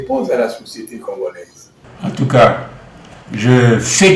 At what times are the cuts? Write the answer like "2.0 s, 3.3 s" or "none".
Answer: none